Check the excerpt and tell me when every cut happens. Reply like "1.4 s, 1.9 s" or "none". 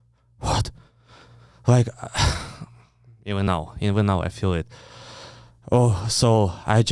none